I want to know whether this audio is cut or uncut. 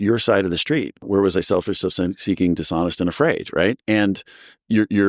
cut